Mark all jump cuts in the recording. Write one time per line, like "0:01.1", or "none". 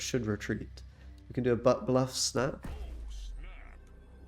none